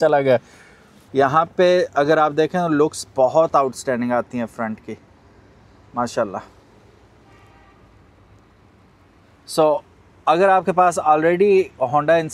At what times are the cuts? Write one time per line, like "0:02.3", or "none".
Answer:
0:01.0